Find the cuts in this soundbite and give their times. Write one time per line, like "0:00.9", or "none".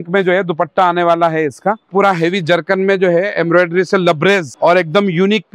0:01.9
0:04.5